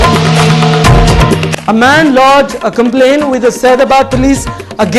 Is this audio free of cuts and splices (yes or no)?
yes